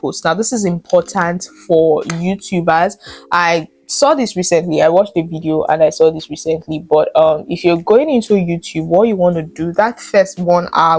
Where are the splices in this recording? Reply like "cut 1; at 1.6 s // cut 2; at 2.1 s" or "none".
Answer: none

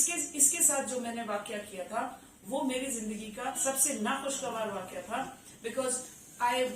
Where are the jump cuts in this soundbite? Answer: cut 1; at 3.6 s

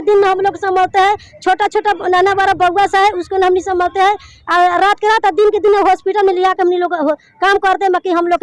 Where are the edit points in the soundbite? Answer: none

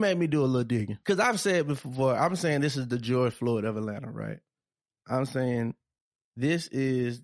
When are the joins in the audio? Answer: cut 1; at 0.9 s

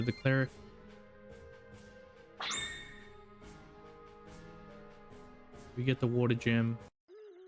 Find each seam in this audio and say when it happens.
none

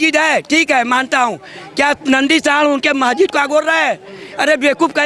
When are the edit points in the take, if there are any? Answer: none

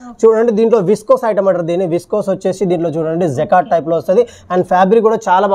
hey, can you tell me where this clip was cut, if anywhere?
none

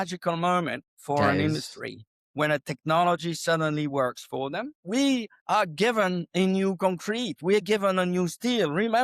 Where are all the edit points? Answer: cut 1; at 4.8 s // cut 2; at 5.3 s

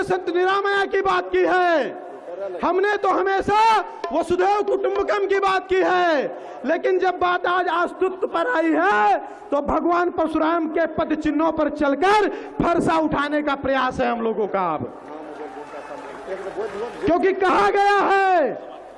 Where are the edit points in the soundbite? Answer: none

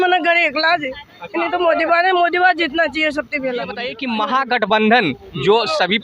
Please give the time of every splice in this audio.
cut 1; at 4.0 s

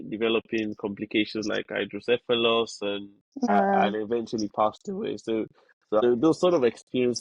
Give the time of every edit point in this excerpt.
cut 1; at 3.5 s // cut 2; at 6.0 s

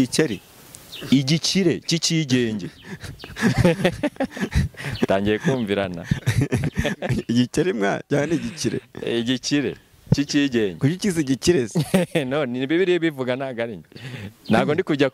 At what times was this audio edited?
none

